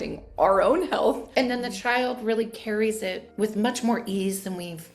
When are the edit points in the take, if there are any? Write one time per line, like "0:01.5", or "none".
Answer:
0:01.2
0:03.2